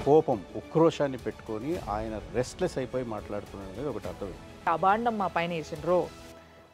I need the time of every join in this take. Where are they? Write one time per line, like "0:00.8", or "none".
0:04.7